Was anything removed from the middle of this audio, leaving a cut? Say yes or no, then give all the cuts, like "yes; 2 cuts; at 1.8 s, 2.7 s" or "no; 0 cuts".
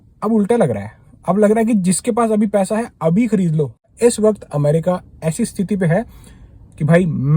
yes; 1 cut; at 3.9 s